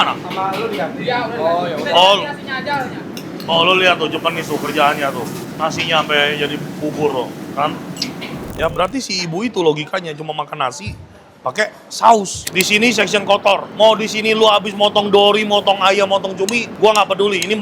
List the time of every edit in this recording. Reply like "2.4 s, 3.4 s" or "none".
8.5 s, 12.4 s, 13.7 s, 16.6 s